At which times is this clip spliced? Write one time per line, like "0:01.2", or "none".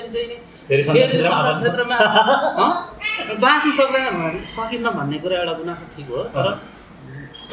none